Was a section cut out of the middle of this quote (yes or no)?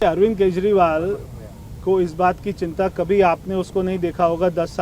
no